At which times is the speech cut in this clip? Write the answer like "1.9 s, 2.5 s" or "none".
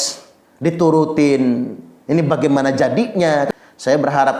3.5 s

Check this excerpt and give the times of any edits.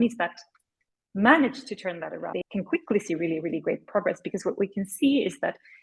2.4 s

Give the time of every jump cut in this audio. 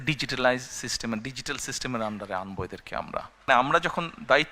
3.5 s

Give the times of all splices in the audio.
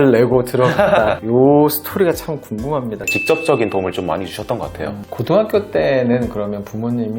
3.1 s

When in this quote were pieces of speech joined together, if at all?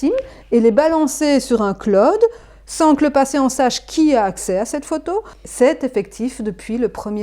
5.4 s

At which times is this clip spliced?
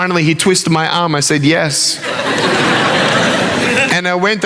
none

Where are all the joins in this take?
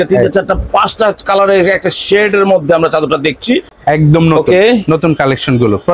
none

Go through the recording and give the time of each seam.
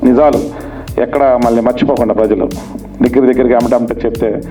none

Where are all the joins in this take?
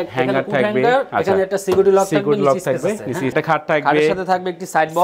3.3 s

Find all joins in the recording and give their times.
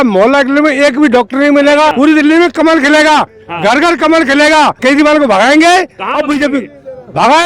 1.9 s, 4.8 s

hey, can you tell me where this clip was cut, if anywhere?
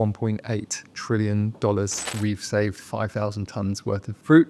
2.1 s

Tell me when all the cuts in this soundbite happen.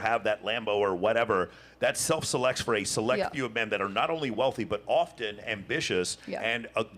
none

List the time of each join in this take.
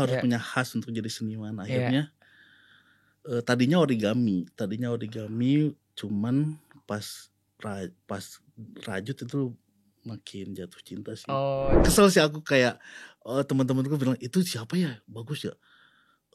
11.8 s

